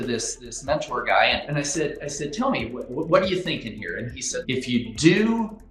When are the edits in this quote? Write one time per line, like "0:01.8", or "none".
0:01.4
0:04.4